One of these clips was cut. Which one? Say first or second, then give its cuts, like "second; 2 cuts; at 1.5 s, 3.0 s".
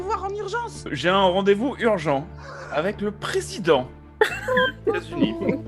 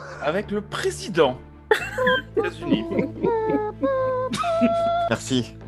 first; 1 cut; at 0.9 s